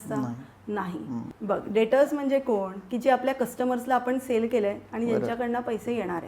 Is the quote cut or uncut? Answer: cut